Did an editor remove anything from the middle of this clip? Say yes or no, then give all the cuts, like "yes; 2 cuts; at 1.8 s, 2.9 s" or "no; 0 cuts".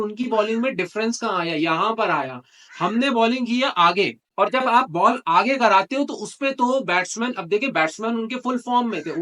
yes; 1 cut; at 4.2 s